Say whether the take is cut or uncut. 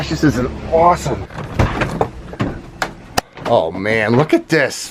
uncut